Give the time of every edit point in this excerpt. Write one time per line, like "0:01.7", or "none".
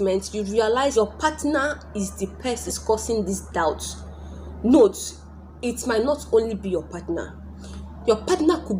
0:00.9
0:02.6